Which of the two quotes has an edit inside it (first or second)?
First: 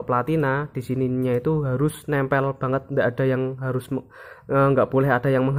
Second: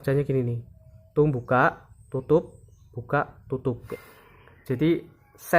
second